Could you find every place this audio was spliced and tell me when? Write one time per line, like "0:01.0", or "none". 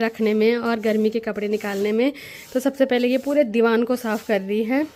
none